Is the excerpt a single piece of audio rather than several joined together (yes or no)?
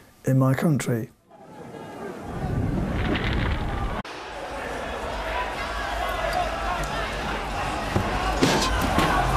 yes